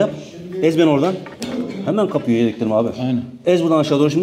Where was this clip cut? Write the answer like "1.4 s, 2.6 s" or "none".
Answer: none